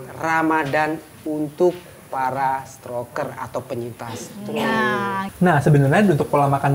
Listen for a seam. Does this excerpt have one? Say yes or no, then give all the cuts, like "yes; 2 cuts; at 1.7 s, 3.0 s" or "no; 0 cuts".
yes; 1 cut; at 5.3 s